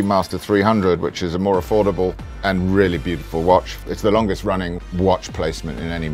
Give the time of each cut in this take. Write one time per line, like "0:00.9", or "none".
none